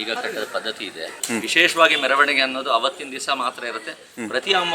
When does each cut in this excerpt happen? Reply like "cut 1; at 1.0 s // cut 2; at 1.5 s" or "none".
cut 1; at 1.1 s